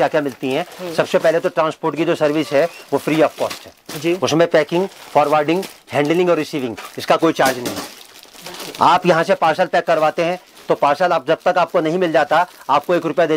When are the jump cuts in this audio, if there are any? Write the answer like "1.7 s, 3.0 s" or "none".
none

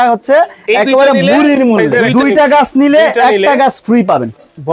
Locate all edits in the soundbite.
2.1 s

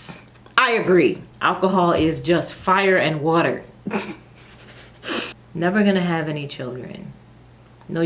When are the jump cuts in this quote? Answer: 1.3 s, 5.4 s

